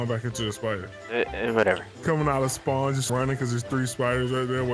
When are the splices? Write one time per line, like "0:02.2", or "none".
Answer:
0:00.9
0:01.9
0:03.1